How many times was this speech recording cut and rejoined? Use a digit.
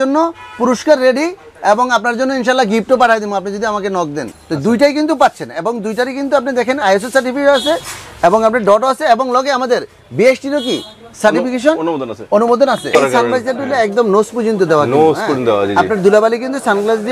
2